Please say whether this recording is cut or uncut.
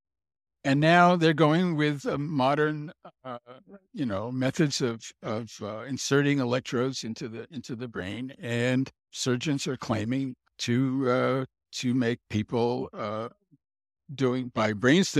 cut